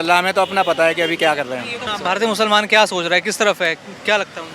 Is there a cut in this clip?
yes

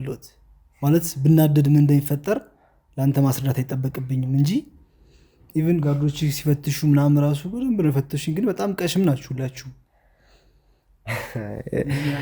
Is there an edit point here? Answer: no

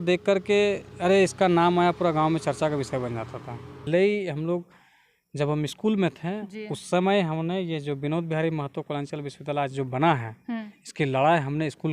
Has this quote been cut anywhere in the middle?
yes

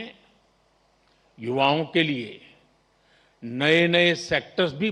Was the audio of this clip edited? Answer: no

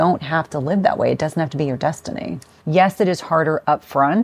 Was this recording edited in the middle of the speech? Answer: yes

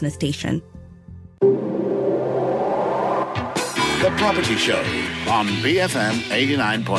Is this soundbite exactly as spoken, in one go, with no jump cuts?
no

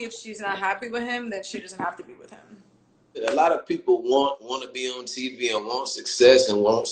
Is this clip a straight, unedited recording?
no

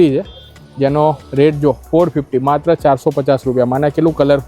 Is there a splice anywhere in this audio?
no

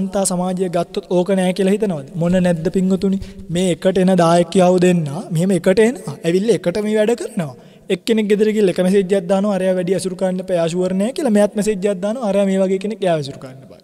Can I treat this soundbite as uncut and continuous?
yes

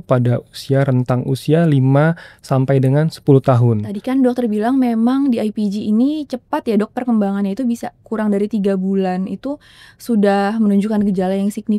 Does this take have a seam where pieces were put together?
yes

